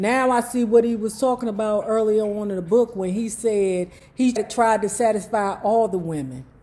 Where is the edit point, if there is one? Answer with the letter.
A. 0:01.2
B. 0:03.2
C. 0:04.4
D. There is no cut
C